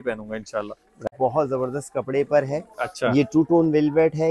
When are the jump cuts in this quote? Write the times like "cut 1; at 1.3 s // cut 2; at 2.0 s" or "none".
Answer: cut 1; at 1.1 s